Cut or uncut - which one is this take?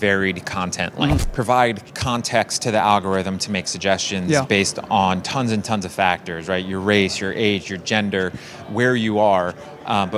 cut